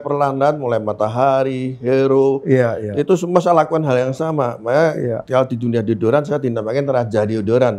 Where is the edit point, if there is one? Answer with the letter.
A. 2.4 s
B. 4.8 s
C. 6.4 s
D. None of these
D